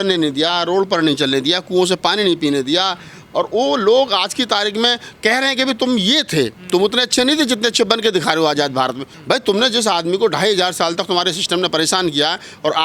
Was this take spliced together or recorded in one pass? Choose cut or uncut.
cut